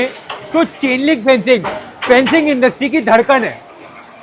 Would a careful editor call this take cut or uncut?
uncut